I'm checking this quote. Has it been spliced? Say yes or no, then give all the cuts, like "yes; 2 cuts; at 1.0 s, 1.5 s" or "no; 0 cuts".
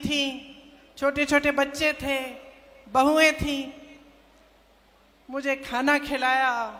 no; 0 cuts